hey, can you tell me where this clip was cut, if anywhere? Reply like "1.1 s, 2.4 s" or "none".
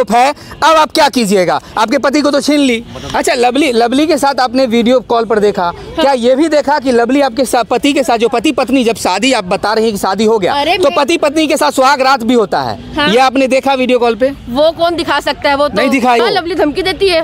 3.1 s, 16.2 s